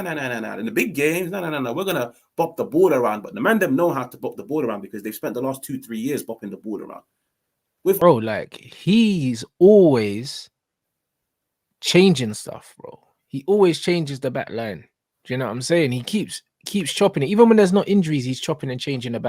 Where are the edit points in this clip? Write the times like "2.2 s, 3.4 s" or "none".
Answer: 8.0 s